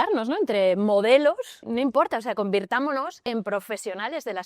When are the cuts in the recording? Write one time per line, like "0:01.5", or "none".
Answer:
0:01.6
0:03.2